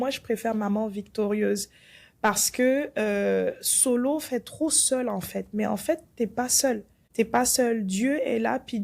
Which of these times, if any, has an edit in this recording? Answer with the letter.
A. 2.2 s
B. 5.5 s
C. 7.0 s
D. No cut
C